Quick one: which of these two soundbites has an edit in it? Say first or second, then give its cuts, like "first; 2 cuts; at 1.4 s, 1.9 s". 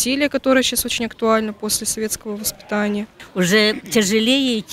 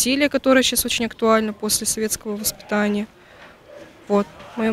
first; 1 cut; at 3.2 s